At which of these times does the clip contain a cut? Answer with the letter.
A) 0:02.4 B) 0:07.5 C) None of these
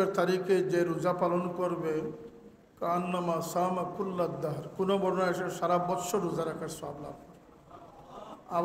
C